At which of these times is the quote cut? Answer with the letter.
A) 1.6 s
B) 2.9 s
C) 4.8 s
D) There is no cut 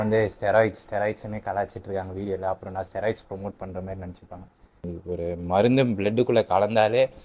C